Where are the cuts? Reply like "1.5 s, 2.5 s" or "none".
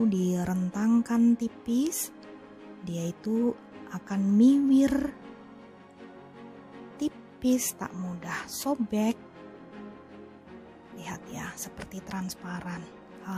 5.1 s, 7.0 s, 9.2 s, 11.0 s